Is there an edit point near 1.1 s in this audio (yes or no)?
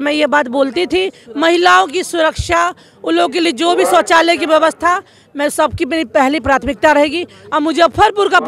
no